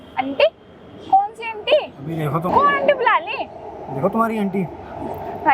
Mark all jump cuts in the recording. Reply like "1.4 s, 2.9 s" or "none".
2.6 s